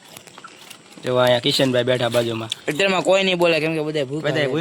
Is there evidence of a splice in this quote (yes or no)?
no